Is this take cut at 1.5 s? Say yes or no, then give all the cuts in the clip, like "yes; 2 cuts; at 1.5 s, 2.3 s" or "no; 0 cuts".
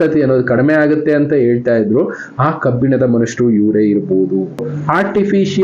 no; 1 cut; at 4.7 s